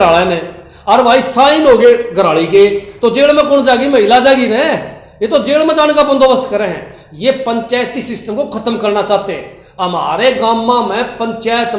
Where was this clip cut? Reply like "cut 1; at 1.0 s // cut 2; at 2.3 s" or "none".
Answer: none